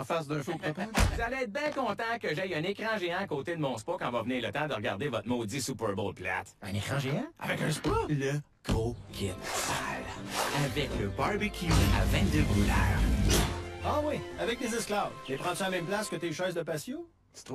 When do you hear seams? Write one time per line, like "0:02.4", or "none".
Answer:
0:10.3